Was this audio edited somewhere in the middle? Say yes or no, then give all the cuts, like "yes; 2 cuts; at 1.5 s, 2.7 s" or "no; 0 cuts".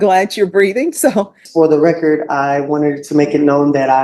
yes; 1 cut; at 1.4 s